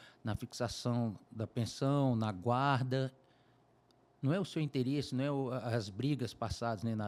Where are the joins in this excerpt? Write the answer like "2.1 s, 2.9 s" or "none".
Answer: none